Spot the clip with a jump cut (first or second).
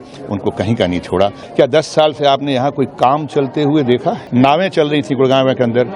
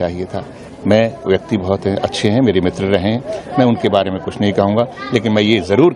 first